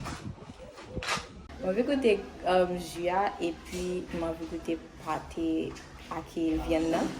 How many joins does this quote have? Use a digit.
1